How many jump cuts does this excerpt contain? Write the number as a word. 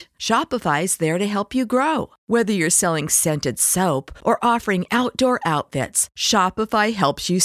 zero